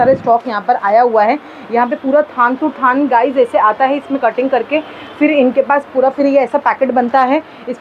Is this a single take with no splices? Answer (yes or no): yes